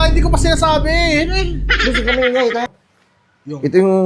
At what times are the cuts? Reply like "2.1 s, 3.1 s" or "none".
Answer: 2.7 s